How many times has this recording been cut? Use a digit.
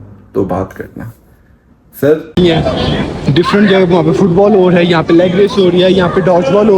1